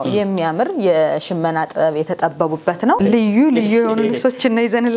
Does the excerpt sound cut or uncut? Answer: cut